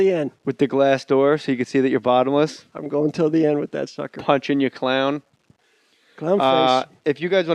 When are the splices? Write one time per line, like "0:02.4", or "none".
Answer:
none